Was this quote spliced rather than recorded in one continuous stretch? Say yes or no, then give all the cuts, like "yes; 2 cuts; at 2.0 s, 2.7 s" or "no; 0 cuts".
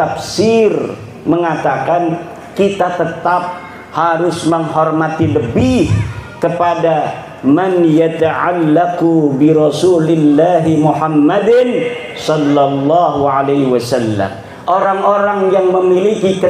no; 0 cuts